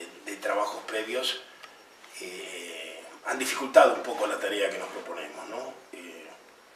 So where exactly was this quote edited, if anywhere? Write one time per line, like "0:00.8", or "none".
none